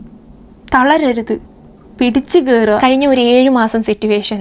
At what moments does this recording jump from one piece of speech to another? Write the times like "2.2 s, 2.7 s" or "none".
2.9 s